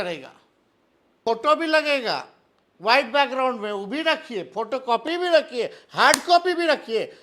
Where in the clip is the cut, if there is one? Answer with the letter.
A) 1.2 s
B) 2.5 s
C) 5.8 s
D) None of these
A